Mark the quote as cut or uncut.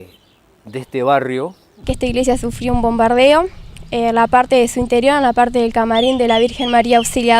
cut